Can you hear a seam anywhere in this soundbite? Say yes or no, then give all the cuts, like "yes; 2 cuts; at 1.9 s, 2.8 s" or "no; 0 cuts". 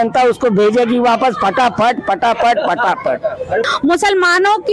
yes; 1 cut; at 3.7 s